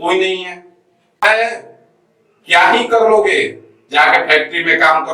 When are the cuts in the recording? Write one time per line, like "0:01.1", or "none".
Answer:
0:01.2